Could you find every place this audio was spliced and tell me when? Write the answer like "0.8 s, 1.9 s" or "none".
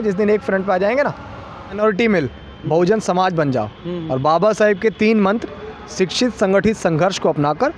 1.8 s